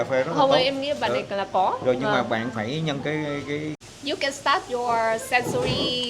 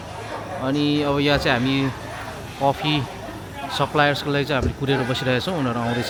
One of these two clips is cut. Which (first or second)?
first